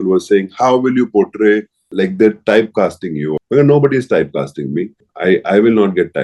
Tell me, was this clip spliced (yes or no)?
yes